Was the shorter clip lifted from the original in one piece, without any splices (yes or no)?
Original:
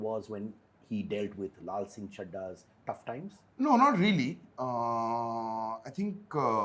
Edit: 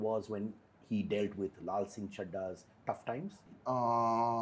no